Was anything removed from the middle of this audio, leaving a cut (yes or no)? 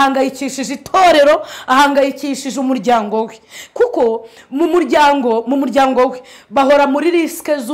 no